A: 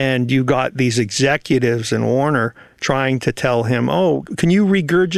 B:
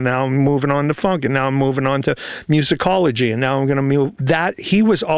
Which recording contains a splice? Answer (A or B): B